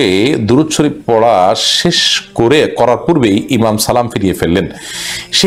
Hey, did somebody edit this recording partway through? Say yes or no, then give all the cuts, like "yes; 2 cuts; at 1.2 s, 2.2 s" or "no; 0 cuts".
no; 0 cuts